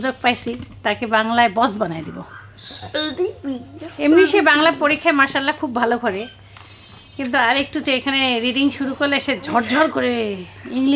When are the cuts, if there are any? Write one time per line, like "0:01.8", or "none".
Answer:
none